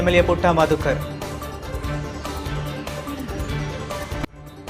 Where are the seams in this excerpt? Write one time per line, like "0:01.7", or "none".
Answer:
0:00.9